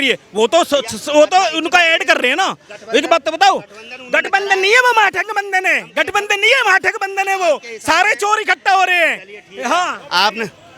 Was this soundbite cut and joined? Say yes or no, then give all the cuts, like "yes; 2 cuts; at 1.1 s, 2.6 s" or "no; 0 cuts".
no; 0 cuts